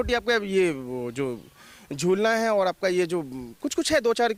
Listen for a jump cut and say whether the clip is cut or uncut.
uncut